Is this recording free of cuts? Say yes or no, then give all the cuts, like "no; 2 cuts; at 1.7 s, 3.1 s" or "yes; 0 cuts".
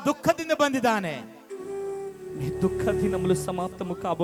yes; 0 cuts